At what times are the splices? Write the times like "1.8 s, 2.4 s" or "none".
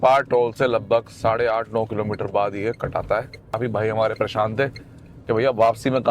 3.6 s